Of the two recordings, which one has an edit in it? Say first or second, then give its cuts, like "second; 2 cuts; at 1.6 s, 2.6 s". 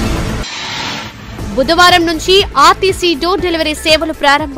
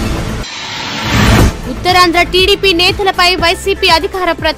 first; 1 cut; at 0.9 s